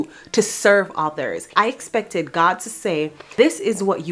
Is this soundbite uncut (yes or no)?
no